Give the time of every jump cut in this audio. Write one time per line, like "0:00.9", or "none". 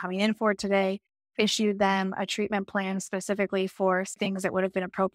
0:04.2